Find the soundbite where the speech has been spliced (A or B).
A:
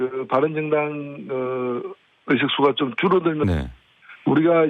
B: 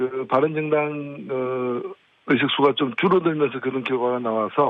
B